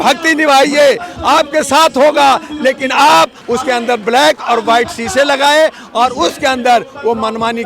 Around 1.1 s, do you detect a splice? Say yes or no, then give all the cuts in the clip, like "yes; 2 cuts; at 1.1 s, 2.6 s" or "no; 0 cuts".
no; 1 cut; at 3.4 s